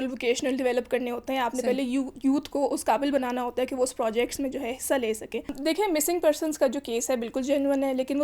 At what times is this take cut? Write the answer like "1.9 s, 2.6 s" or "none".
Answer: 5.5 s